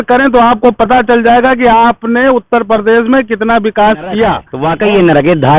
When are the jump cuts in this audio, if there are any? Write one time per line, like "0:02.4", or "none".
0:04.5